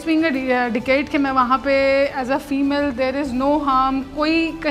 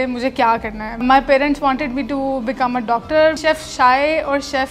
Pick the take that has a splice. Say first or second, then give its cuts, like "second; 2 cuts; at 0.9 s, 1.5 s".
second; 2 cuts; at 1.0 s, 3.4 s